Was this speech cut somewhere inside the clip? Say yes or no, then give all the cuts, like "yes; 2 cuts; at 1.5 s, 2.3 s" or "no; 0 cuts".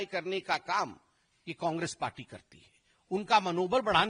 no; 0 cuts